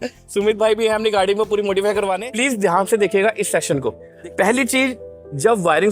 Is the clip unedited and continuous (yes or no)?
no